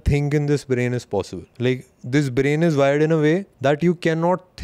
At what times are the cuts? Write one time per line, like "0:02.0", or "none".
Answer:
0:01.4
0:03.5